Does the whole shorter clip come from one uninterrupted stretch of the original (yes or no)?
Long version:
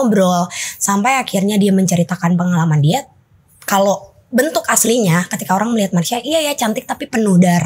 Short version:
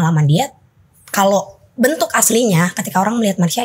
yes